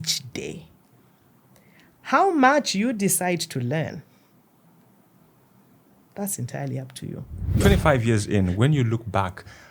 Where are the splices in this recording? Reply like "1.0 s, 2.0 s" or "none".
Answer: 7.6 s